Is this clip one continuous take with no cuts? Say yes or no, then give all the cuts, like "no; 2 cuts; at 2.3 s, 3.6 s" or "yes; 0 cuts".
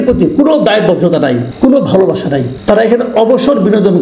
no; 2 cuts; at 1.5 s, 2.5 s